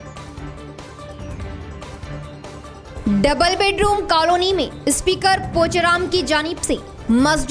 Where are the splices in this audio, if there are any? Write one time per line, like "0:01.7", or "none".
0:02.0
0:02.5